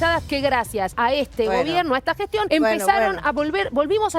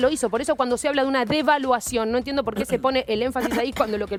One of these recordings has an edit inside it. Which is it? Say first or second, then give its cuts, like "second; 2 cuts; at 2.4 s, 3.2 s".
first; 2 cuts; at 0.9 s, 2.5 s